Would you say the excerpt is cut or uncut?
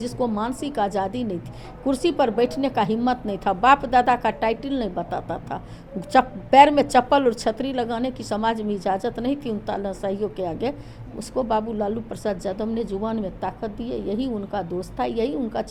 uncut